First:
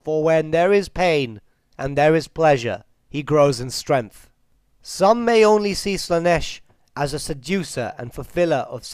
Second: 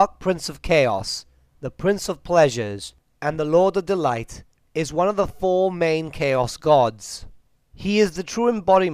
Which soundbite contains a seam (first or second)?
second